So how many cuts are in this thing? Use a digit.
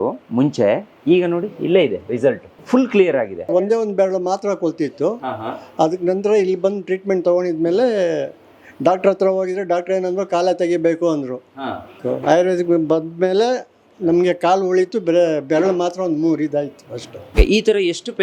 4